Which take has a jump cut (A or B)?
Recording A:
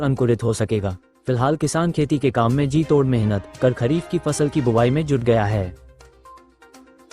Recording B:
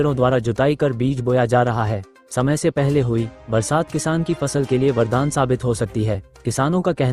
A